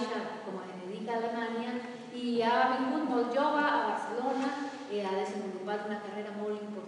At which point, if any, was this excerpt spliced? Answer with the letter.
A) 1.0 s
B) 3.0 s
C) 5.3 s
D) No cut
B